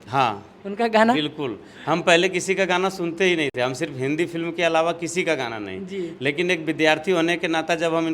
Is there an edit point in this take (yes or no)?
no